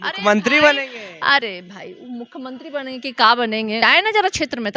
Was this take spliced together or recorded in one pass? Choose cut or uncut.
cut